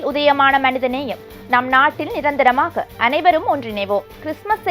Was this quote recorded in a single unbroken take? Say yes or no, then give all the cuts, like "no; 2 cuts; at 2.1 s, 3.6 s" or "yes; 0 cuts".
yes; 0 cuts